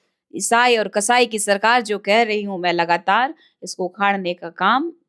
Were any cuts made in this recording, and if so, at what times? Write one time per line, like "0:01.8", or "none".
none